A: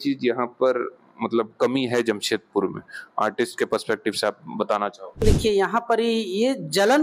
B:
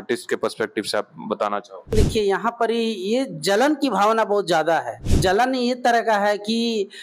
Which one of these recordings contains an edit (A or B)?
B